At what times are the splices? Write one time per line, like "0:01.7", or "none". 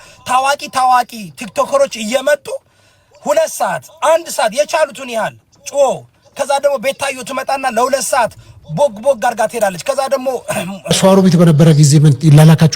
0:10.9